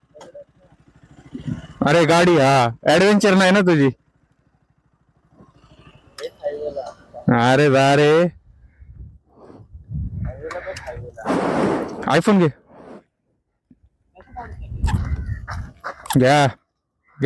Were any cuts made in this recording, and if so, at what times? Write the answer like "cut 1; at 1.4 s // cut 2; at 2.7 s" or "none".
none